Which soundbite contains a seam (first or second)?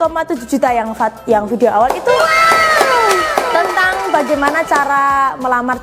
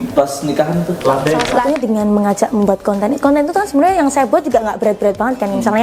second